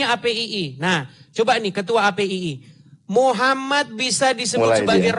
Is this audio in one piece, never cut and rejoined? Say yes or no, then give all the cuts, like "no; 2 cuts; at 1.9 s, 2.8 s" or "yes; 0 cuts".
yes; 0 cuts